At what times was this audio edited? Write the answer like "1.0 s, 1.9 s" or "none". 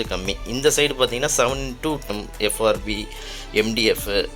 2.1 s

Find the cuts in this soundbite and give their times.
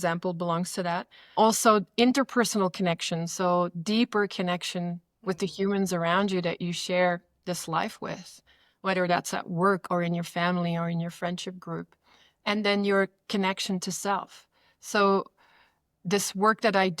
1.3 s

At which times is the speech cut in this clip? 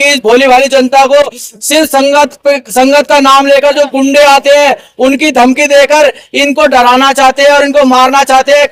none

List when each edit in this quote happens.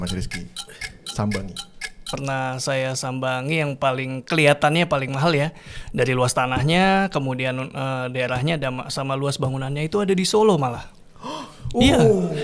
2.1 s

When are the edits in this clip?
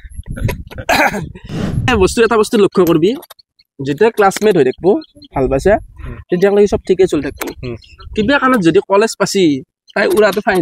1.9 s

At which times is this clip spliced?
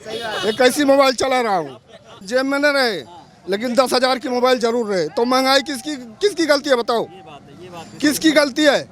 2.1 s

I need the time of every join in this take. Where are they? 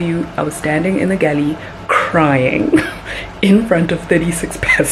none

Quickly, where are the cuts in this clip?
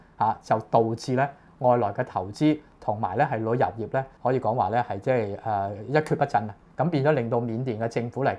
4.1 s

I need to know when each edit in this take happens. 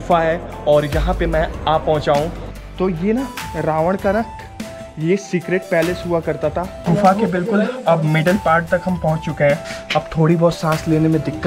2.3 s, 6.9 s, 9.7 s

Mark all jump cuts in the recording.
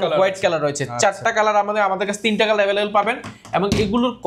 none

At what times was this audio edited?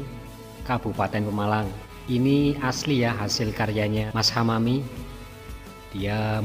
1.9 s, 4.1 s

